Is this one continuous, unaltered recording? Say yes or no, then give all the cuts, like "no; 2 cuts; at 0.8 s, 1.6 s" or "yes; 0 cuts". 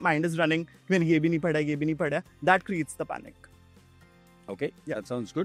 yes; 0 cuts